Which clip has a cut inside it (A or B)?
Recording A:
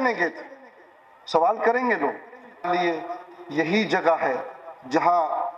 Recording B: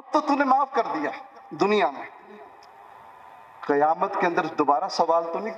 A